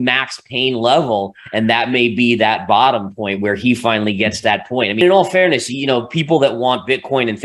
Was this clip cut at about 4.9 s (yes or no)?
yes